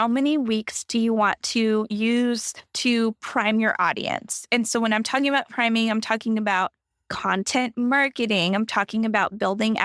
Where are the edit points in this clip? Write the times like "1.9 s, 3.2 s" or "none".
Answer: none